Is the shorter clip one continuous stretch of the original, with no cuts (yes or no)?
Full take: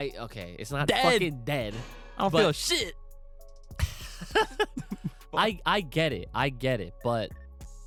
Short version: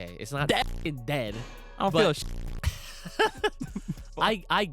no